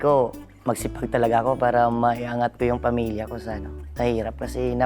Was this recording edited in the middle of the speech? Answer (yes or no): no